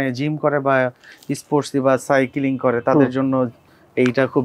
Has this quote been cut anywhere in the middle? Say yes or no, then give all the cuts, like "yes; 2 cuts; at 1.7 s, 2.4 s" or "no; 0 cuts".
no; 0 cuts